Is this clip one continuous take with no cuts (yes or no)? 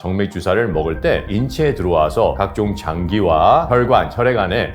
yes